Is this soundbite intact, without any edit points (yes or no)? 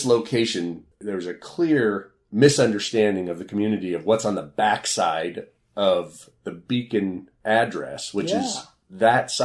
no